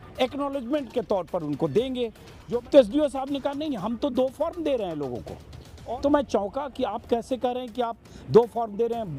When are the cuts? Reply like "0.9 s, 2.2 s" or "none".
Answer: 2.3 s, 5.7 s